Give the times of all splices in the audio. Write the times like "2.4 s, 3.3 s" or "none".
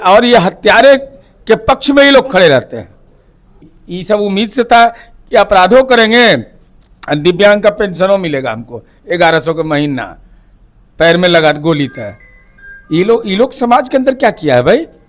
3.7 s